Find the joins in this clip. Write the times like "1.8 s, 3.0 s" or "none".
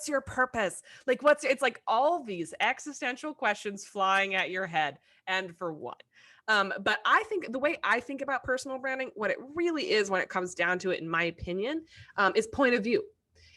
none

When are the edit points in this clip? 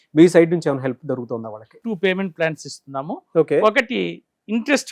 1.7 s

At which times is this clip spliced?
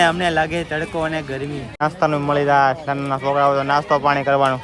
1.8 s

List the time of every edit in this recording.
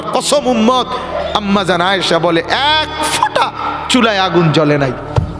1.2 s

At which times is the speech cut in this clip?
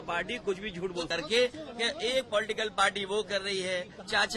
1.1 s

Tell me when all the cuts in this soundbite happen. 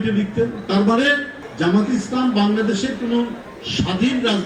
none

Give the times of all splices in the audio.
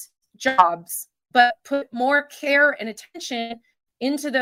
none

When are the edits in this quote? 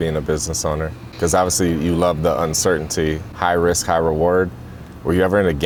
none

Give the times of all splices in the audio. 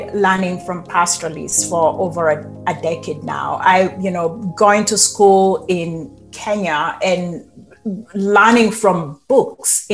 none

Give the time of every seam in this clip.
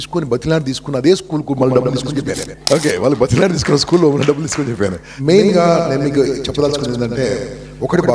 2.5 s, 5.1 s

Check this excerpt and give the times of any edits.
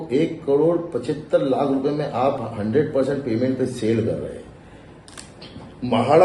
none

